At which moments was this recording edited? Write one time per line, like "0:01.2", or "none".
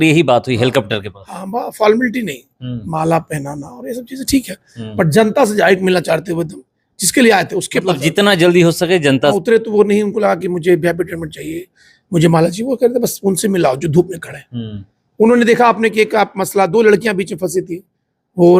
0:09.4